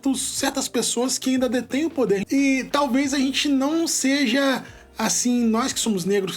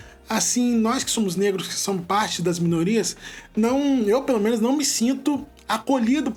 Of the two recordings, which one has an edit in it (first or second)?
first